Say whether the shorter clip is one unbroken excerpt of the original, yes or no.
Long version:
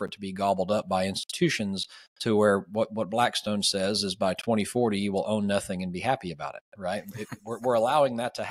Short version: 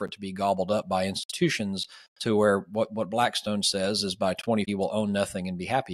no